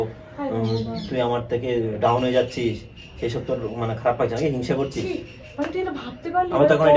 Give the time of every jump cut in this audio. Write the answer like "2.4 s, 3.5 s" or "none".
none